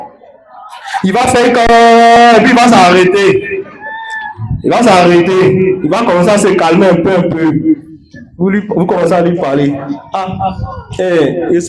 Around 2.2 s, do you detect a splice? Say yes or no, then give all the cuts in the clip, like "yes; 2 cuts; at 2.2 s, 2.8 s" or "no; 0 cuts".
yes; 1 cut; at 2.2 s